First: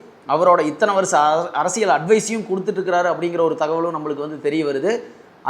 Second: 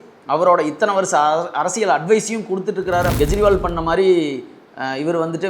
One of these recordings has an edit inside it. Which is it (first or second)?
second